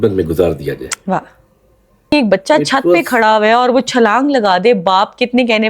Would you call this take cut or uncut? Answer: cut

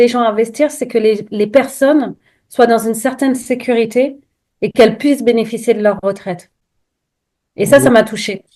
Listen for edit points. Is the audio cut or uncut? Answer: uncut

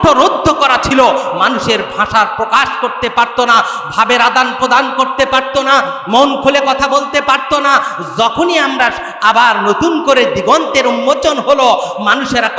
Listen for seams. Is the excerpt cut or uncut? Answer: uncut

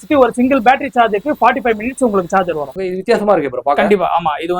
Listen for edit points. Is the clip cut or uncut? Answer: cut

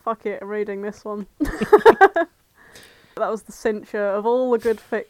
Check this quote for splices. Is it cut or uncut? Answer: cut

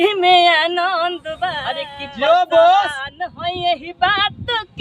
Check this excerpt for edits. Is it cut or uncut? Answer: cut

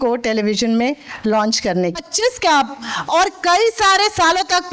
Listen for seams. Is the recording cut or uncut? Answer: cut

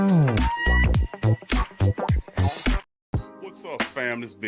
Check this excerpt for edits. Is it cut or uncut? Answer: cut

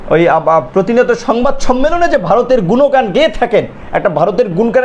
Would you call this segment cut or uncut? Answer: uncut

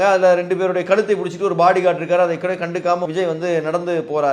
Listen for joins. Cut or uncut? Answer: cut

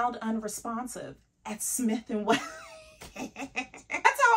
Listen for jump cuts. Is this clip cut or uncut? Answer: uncut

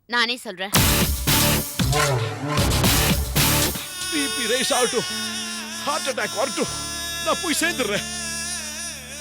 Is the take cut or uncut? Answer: cut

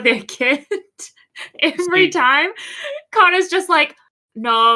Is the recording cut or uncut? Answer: uncut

